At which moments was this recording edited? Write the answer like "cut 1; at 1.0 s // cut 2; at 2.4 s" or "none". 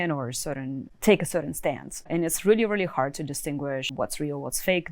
cut 1; at 0.9 s // cut 2; at 2.1 s // cut 3; at 3.9 s

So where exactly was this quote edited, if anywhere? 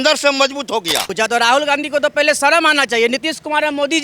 cut 1; at 1.1 s

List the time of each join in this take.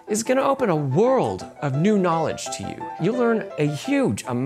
cut 1; at 3.0 s

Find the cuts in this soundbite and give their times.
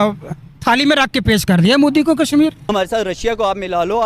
cut 1; at 2.6 s

